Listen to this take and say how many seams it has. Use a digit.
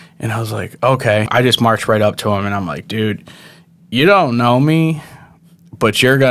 1